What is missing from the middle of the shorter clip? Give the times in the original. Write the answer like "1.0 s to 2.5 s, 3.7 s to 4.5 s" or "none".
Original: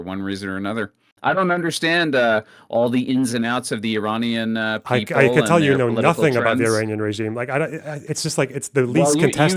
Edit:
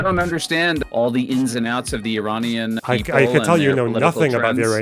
2.1 s to 2.6 s, 4.6 s to 4.8 s